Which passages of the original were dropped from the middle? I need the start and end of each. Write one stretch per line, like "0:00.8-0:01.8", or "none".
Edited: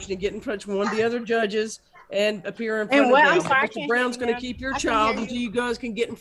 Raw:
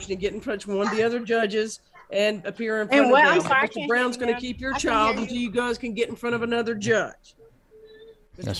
none